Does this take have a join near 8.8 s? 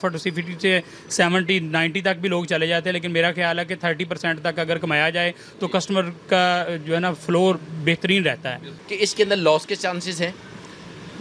yes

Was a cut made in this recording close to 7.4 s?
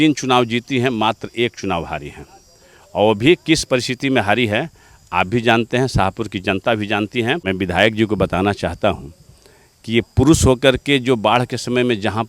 yes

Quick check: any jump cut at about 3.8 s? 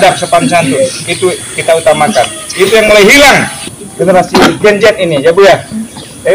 yes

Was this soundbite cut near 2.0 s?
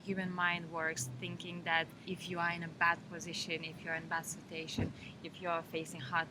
no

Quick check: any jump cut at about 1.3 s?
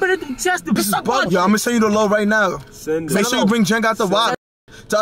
yes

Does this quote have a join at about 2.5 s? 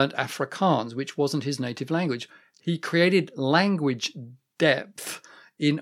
yes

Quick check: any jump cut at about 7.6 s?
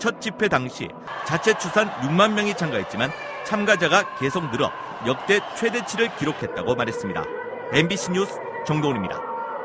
no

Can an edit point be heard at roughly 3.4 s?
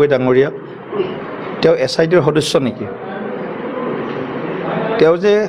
no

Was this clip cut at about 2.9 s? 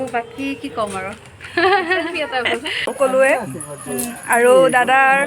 yes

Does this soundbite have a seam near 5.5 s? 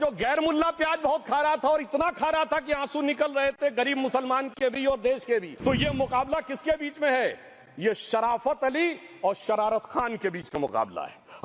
yes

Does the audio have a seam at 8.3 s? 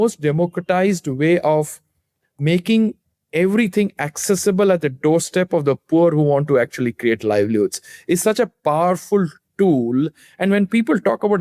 no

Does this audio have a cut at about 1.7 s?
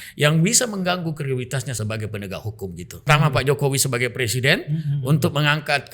yes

